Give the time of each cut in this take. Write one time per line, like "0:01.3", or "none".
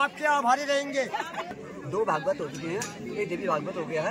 0:01.5

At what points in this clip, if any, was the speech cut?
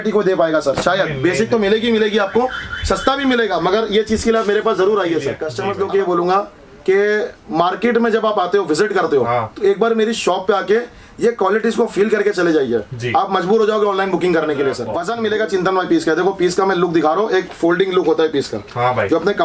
0:05.4
0:14.9

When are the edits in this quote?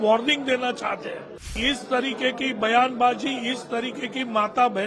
0:01.4

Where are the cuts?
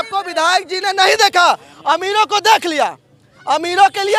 none

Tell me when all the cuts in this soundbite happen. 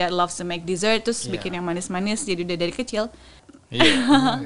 0:03.4

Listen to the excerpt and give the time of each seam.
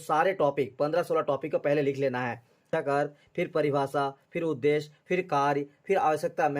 0:02.6

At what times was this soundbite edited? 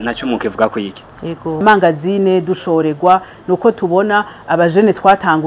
0:01.6

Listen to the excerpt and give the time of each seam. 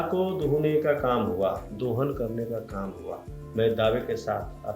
0:03.3

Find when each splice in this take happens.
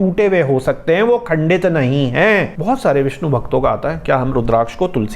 0:02.5

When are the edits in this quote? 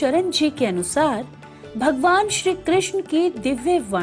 none

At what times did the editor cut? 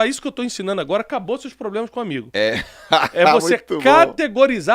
none

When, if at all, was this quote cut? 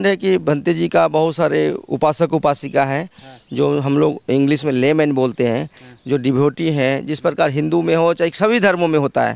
none

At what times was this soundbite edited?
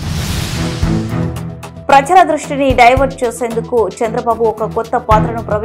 none

